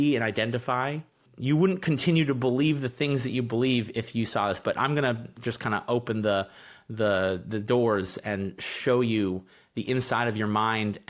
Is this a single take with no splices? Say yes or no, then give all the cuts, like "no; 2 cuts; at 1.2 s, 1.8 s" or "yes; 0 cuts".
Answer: yes; 0 cuts